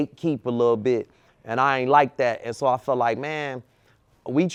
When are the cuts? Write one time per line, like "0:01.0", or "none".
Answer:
none